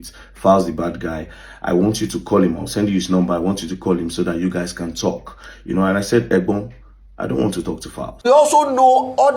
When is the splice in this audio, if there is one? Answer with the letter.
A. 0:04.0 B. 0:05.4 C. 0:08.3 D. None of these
C